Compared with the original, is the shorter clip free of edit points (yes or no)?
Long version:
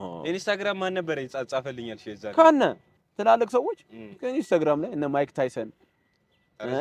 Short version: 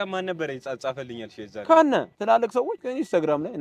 no